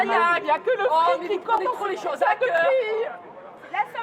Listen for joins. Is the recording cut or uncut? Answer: uncut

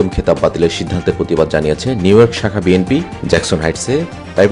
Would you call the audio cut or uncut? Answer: uncut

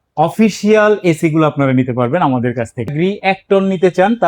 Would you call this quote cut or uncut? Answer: cut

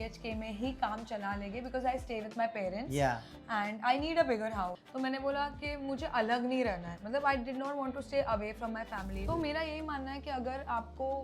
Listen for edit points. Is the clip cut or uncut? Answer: cut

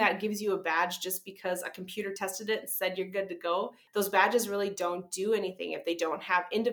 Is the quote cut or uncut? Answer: cut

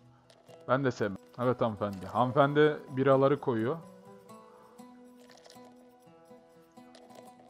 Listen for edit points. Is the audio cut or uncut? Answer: cut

